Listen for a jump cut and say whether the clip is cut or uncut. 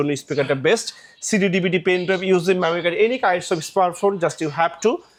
uncut